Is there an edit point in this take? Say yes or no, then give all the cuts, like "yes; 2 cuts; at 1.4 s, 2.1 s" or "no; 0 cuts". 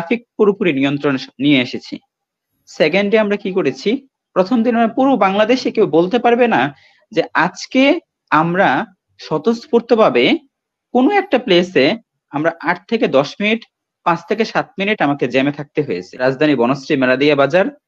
yes; 1 cut; at 16.1 s